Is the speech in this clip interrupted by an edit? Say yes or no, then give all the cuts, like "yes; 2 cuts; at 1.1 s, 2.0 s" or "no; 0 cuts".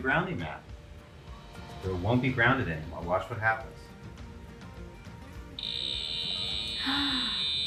no; 0 cuts